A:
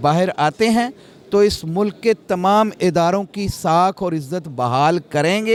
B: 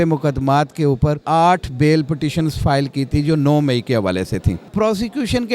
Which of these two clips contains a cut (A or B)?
B